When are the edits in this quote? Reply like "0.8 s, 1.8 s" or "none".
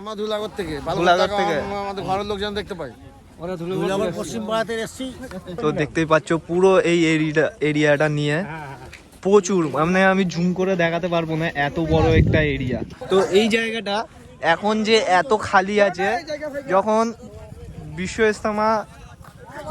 5.5 s, 12.9 s